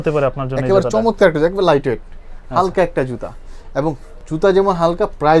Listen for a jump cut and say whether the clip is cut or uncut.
uncut